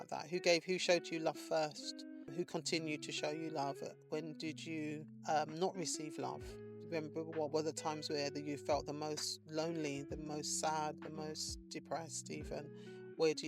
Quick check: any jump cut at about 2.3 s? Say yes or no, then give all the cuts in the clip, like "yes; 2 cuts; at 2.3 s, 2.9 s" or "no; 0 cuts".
yes; 2 cuts; at 2.3 s, 5.1 s